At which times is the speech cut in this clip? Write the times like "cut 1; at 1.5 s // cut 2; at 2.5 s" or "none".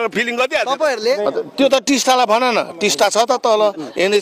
cut 1; at 1.2 s